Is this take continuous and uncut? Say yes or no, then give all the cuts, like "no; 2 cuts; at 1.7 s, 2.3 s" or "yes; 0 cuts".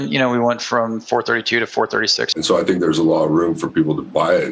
no; 1 cut; at 2.3 s